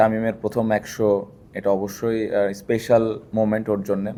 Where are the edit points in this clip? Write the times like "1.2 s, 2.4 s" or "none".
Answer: none